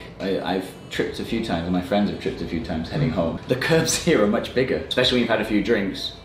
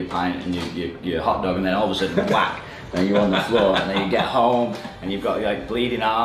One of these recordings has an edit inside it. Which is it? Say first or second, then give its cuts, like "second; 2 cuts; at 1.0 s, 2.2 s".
first; 2 cuts; at 3.4 s, 4.9 s